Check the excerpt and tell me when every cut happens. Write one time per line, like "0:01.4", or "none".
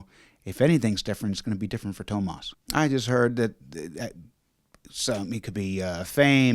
0:02.5